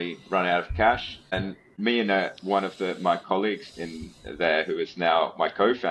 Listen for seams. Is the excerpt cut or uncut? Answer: cut